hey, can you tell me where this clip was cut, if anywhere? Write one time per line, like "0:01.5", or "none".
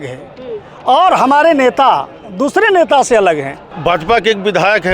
0:03.8